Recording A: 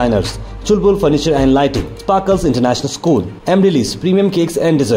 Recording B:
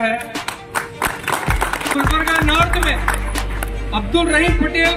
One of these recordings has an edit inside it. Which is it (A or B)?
B